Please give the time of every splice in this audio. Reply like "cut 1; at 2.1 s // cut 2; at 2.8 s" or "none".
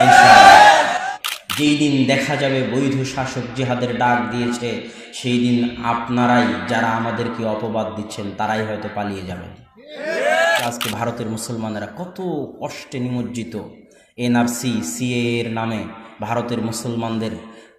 cut 1; at 1.1 s // cut 2; at 10.6 s